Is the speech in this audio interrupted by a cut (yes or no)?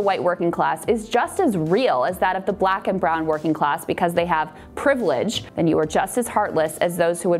yes